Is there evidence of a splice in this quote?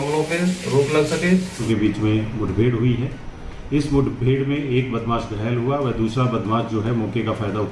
yes; 1 cut; at 1.6 s

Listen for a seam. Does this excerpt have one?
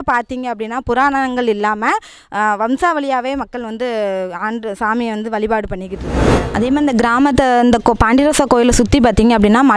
yes; 1 cut; at 6.4 s

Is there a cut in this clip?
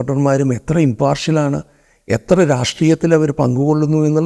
no; 0 cuts

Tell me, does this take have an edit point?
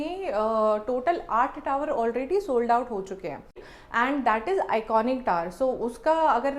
yes; 1 cut; at 3.6 s

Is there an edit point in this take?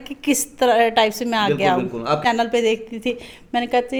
no; 0 cuts

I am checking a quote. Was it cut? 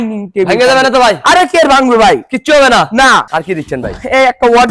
no; 0 cuts

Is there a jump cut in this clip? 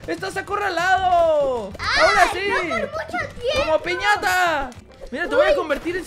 yes; 1 cut; at 4.9 s

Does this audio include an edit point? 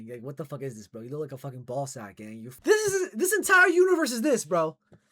yes; 1 cut; at 2.4 s

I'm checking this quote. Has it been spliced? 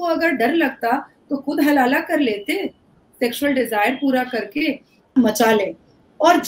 yes; 1 cut; at 5.1 s

